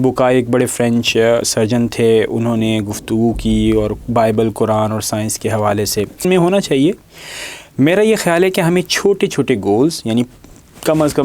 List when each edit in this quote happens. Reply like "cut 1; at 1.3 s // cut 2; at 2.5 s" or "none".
cut 1; at 6.3 s